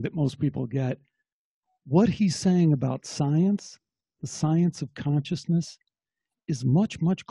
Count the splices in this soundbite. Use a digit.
0